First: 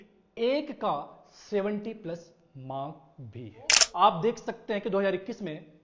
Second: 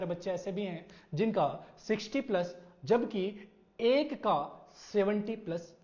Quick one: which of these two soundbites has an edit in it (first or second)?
first